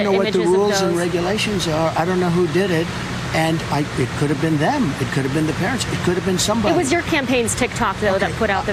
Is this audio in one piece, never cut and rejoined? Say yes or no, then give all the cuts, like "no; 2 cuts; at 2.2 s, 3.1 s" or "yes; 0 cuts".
yes; 0 cuts